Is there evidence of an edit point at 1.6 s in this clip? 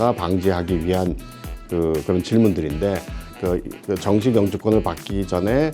no; 1 cut; at 3.3 s

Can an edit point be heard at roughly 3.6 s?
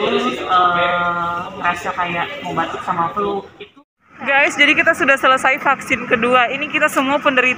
yes; 1 cut; at 3.6 s

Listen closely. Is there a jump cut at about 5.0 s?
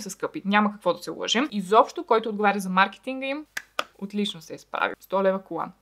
yes; 2 cuts; at 1.5 s, 5.0 s

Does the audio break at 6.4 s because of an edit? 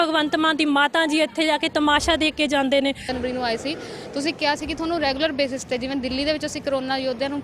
no; 1 cut; at 3.1 s

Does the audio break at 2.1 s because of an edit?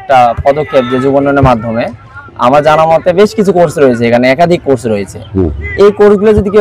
no; 0 cuts

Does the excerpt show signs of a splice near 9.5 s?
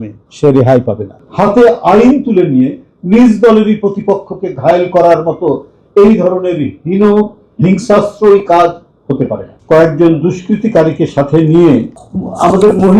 yes; 2 cuts; at 1.1 s, 9.5 s

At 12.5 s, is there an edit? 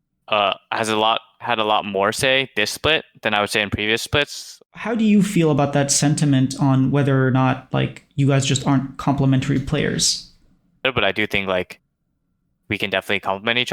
no; 2 cuts; at 4.5 s, 10.8 s

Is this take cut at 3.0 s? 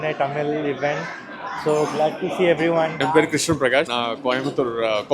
yes; 2 cuts; at 3.0 s, 3.9 s

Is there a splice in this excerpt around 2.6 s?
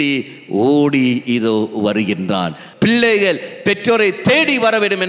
yes; 1 cut; at 2.6 s

